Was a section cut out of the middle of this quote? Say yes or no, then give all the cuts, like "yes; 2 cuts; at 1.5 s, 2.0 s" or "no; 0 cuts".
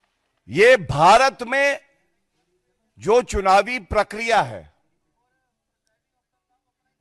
no; 0 cuts